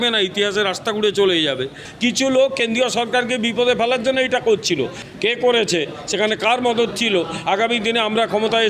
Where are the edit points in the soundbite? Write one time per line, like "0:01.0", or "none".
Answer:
0:01.8
0:05.0

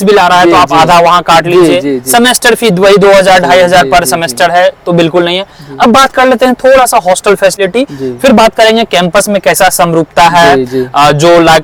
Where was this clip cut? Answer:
none

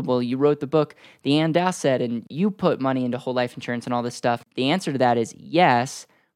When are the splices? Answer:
0:02.3
0:04.4

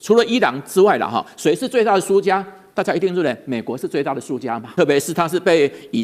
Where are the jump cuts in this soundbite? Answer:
0:04.7

